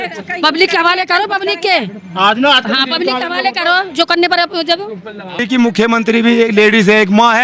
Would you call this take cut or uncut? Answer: cut